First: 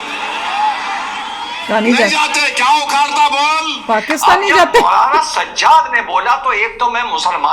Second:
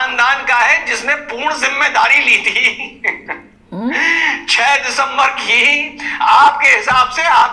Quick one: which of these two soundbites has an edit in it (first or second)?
first